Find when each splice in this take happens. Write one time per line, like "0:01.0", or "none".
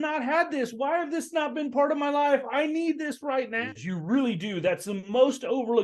0:03.7